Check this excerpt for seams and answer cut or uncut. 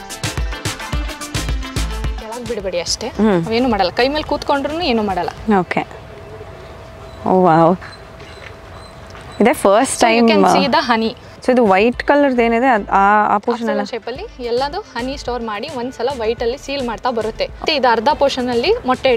cut